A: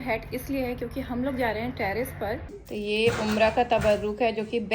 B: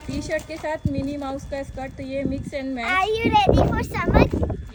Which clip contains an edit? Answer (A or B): A